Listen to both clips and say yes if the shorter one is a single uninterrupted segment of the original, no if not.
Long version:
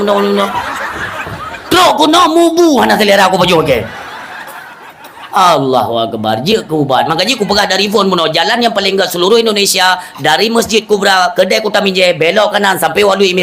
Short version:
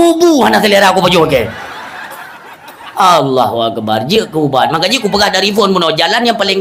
yes